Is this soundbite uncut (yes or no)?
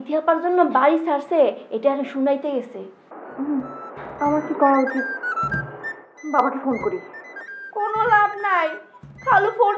yes